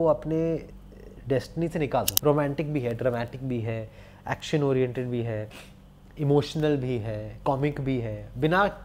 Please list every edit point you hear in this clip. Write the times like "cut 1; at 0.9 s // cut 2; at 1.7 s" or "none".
cut 1; at 2.1 s